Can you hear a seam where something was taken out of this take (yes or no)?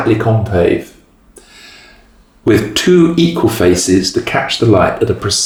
no